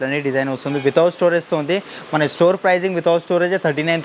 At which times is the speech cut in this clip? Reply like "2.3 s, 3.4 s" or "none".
none